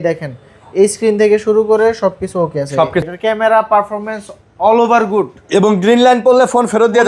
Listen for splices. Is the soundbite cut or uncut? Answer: cut